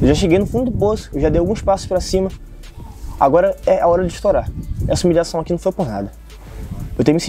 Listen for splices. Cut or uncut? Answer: uncut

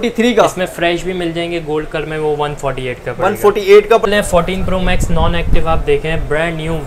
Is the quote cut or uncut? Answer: cut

